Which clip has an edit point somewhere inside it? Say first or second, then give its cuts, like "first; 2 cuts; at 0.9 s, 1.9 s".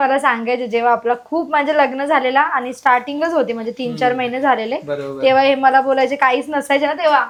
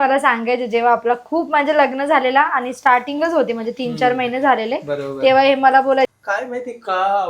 second; 1 cut; at 6.1 s